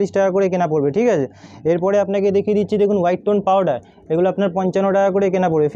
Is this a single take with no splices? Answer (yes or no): yes